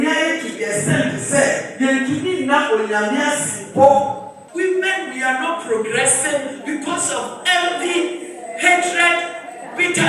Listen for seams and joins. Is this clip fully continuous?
no; 1 cut; at 4.4 s

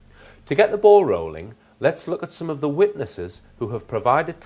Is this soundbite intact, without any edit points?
yes; 0 cuts

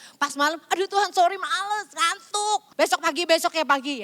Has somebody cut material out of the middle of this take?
yes; 1 cut; at 2.7 s

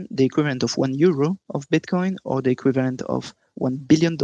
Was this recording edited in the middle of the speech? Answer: yes; 1 cut; at 1.5 s

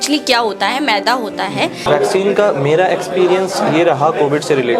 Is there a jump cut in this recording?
yes; 1 cut; at 1.8 s

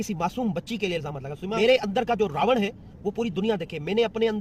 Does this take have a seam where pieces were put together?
yes; 1 cut; at 1.5 s

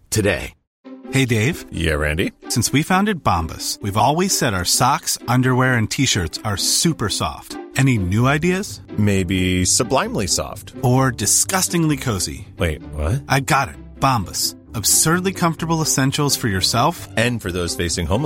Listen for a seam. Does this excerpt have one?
no; 0 cuts

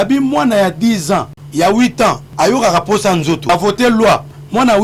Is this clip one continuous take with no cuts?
no; 3 cuts; at 1.4 s, 2.3 s, 3.5 s

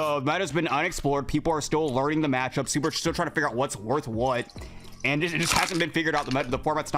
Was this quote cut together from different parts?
no; 0 cuts

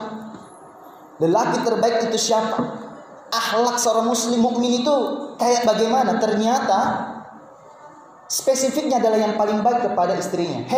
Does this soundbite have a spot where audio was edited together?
no; 0 cuts

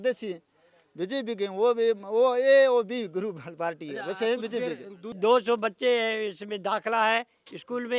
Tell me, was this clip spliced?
yes; 1 cut; at 5.2 s

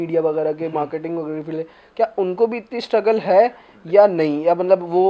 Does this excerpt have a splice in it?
no; 0 cuts

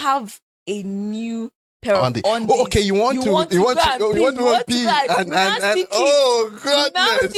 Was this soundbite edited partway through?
no; 0 cuts

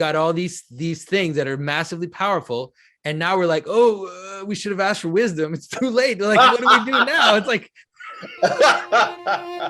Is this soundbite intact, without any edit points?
yes; 0 cuts

